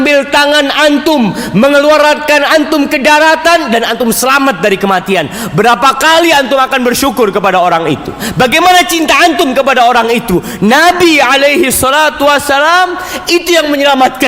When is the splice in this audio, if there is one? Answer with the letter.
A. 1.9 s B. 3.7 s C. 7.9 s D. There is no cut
D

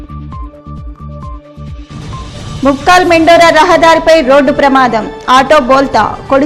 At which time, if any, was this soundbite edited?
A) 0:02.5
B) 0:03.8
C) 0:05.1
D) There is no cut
D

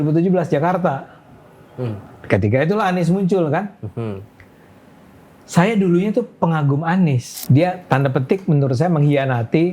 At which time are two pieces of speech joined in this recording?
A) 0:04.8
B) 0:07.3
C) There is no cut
B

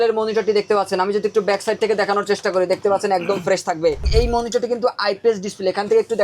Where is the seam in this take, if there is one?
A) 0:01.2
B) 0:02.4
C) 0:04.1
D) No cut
C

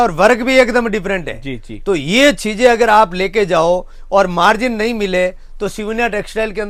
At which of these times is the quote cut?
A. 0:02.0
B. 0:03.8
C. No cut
C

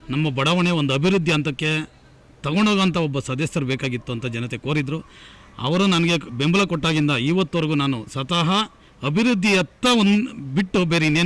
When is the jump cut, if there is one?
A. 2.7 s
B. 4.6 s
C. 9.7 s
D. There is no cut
D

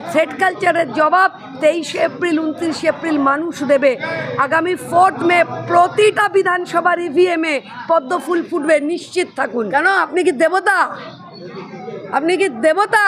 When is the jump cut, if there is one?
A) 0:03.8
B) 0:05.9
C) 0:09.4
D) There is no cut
C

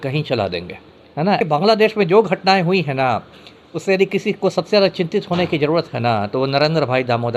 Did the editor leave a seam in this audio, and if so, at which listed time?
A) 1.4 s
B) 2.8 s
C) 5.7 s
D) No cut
A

